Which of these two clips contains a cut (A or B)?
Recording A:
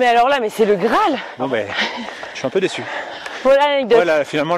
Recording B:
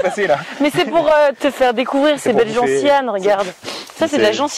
A